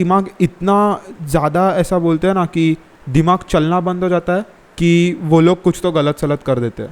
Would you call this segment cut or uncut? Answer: cut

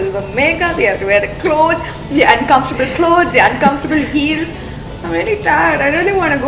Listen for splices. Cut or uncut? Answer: uncut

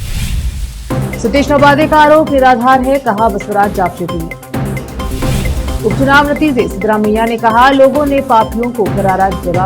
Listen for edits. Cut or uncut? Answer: cut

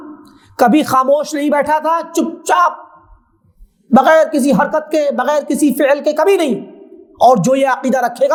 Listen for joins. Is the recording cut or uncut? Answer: uncut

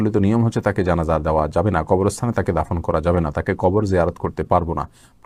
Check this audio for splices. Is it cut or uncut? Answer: uncut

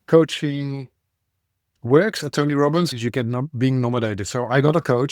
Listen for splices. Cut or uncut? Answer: cut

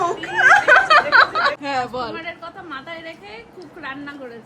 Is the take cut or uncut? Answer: cut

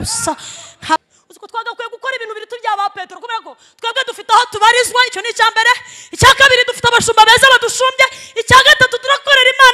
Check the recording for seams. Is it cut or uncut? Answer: cut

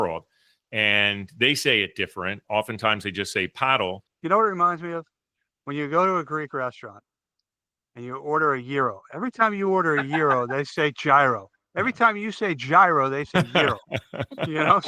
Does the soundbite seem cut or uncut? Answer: cut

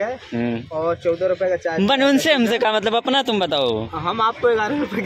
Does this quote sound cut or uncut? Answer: uncut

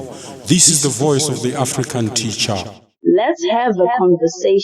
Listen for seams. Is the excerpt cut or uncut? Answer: cut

